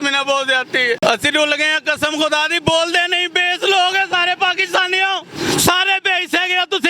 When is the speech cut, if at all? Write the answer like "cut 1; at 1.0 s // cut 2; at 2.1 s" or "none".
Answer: cut 1; at 1.0 s